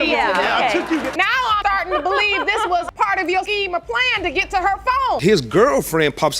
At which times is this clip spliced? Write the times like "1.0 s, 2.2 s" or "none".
1.1 s, 5.2 s